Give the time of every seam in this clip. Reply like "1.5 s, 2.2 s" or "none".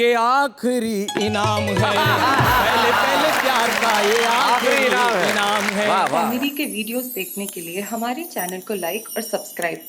6.2 s